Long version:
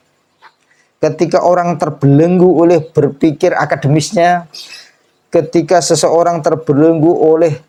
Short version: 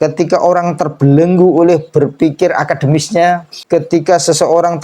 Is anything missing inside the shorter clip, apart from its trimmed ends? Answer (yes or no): yes